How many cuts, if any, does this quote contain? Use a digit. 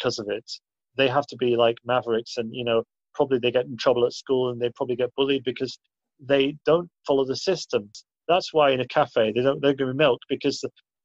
1